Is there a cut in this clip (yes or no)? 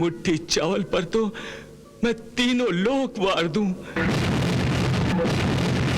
yes